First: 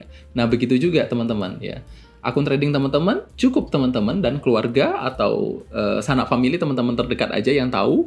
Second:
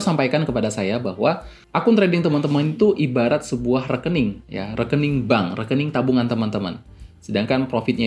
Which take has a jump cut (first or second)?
second